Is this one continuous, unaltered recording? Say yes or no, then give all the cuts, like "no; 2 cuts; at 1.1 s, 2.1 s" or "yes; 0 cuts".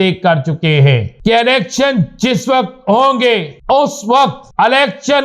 no; 3 cuts; at 1.1 s, 3.5 s, 4.4 s